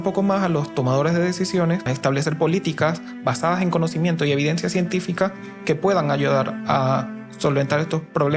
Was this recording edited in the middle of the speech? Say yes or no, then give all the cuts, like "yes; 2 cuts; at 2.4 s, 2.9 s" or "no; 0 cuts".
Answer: yes; 1 cut; at 1.9 s